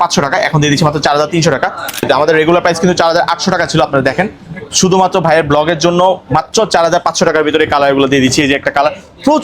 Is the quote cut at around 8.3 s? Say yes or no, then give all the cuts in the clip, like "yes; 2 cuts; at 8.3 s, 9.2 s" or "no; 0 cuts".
no; 1 cut; at 2.0 s